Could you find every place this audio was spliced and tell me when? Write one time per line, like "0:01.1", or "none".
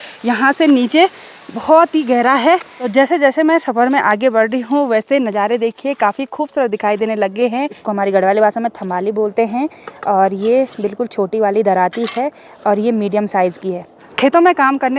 0:02.8
0:07.8
0:14.1